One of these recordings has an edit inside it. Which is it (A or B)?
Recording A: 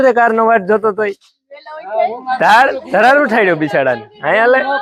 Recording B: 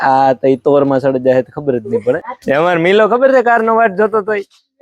B